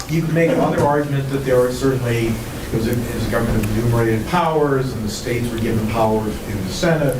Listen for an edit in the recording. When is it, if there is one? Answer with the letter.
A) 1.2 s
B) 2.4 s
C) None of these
A